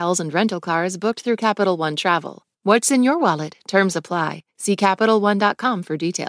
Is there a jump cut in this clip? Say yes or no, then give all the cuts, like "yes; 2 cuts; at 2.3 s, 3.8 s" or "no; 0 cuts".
yes; 1 cut; at 2.4 s